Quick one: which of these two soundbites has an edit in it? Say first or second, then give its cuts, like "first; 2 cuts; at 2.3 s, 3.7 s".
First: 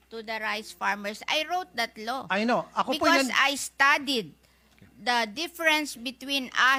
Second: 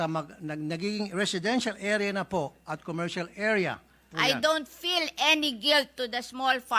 second; 1 cut; at 4.0 s